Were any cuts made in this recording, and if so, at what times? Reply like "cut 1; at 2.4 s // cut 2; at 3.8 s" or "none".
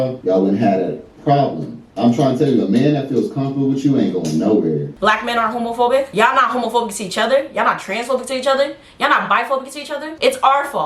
cut 1; at 4.9 s